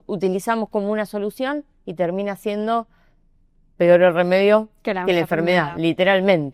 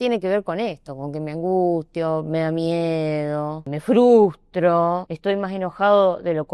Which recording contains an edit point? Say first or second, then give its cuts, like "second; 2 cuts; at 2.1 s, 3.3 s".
second; 2 cuts; at 3.7 s, 5.1 s